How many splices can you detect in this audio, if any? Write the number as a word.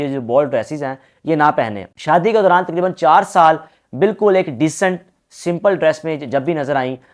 zero